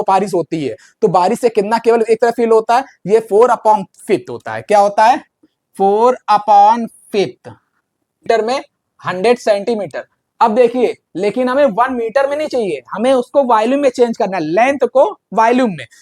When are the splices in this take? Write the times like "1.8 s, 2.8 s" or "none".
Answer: 8.3 s